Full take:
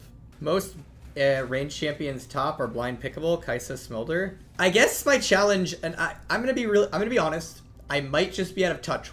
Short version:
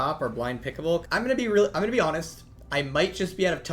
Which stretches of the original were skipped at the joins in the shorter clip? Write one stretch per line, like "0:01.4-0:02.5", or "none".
0:03.4-0:06.2